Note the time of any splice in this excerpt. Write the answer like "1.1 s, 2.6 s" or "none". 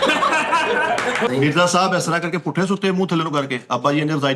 1.3 s